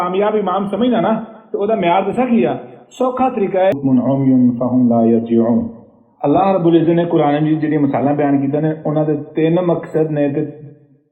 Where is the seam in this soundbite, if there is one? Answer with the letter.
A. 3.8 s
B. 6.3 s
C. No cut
A